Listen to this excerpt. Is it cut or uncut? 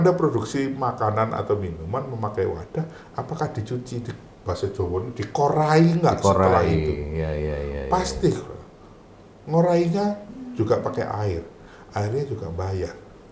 uncut